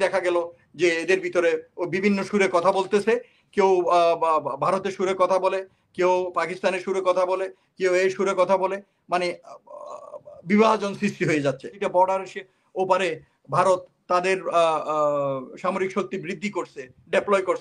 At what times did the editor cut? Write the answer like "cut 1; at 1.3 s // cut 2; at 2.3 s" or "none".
cut 1; at 11.7 s